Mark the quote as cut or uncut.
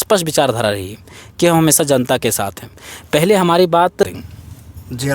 cut